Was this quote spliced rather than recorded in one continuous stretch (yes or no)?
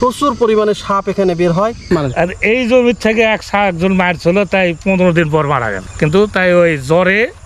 yes